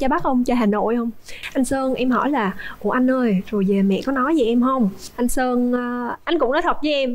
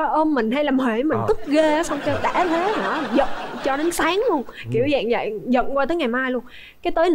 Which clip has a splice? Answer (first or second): first